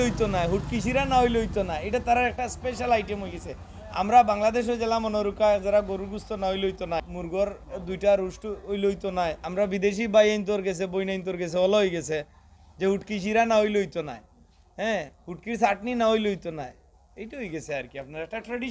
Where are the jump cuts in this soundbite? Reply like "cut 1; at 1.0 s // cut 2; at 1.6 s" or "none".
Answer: cut 1; at 7.1 s // cut 2; at 9.4 s